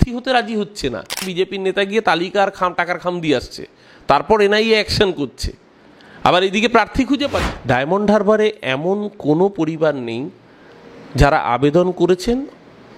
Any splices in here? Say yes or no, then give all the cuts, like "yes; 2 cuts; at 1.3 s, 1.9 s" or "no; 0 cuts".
yes; 2 cuts; at 1.3 s, 7.5 s